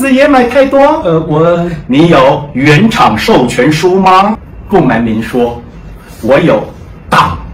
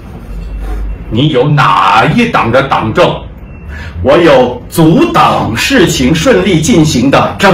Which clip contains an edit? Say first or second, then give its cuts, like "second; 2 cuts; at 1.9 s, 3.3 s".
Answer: first; 1 cut; at 4.4 s